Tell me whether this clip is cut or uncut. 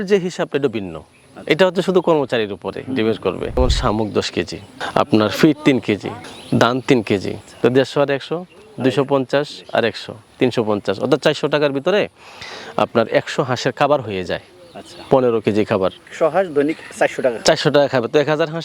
cut